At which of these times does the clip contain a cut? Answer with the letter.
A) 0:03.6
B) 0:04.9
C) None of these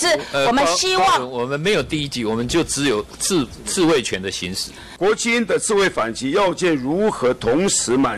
B